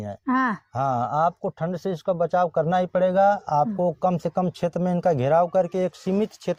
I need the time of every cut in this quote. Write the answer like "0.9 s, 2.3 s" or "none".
none